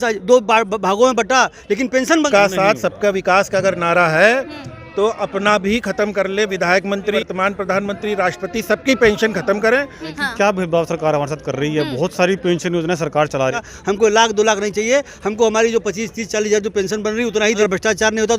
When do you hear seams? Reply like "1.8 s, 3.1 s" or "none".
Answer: 2.3 s, 7.2 s, 10.1 s, 13.7 s, 17.7 s